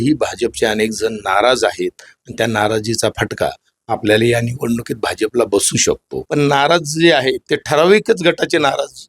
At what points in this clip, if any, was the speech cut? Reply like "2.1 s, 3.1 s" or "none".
6.1 s